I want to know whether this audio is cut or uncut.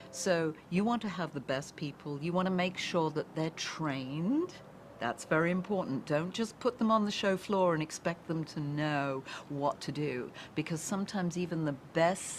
cut